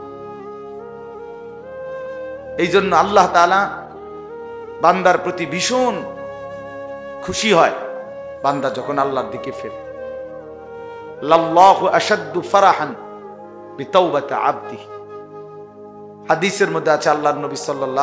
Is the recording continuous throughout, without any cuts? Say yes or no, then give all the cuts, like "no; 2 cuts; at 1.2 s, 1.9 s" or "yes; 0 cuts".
yes; 0 cuts